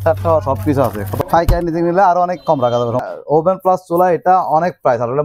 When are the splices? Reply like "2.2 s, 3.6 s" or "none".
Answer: 1.1 s, 3.0 s